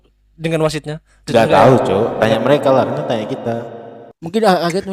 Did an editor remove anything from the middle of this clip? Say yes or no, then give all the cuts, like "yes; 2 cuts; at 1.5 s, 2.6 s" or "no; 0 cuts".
no; 0 cuts